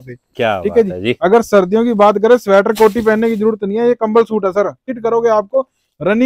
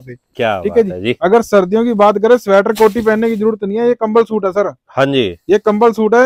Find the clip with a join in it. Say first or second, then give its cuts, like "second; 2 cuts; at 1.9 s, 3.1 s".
first; 1 cut; at 4.8 s